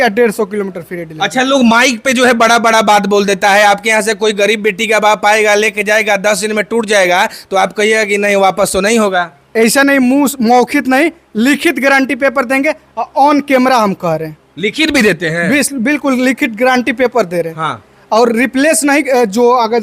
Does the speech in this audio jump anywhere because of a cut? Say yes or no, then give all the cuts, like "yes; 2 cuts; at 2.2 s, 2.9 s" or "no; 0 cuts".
no; 0 cuts